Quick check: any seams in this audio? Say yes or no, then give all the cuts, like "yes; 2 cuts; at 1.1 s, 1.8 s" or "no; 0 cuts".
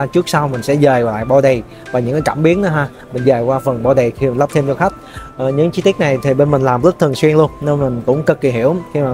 no; 0 cuts